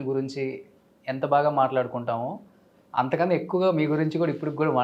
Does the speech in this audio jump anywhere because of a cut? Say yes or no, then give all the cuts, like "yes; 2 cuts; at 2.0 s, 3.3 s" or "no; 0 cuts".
no; 0 cuts